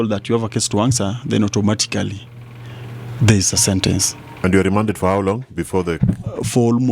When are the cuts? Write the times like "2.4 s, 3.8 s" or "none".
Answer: 4.2 s